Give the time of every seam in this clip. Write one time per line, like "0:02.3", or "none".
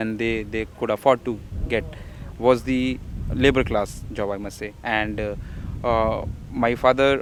none